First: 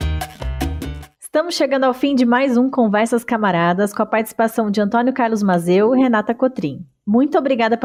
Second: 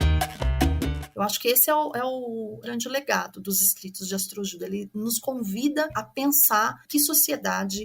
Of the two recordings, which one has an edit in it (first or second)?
second